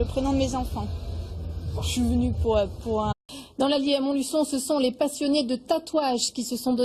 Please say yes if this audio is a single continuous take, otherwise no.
yes